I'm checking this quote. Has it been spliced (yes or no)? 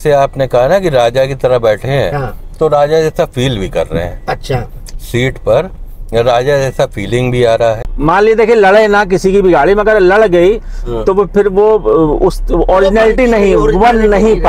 yes